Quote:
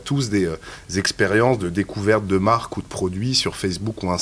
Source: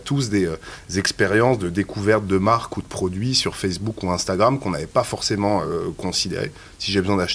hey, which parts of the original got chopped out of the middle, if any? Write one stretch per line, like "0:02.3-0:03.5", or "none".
none